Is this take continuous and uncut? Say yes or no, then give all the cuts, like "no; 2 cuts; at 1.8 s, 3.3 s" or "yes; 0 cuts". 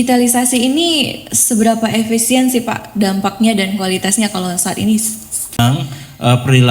no; 1 cut; at 5.6 s